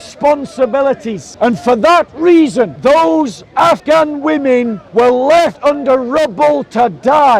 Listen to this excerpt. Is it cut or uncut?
cut